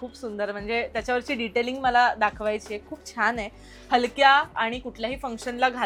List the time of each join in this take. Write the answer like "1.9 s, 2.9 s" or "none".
none